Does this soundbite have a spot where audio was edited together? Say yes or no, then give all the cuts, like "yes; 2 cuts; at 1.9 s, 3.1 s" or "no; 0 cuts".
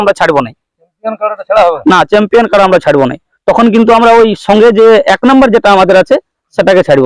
no; 0 cuts